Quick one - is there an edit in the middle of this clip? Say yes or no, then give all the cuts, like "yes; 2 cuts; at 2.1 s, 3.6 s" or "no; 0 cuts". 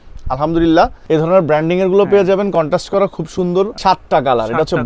yes; 2 cuts; at 1.0 s, 3.8 s